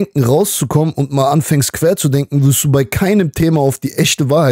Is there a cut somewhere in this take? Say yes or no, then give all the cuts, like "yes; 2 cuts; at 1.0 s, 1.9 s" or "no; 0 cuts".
no; 0 cuts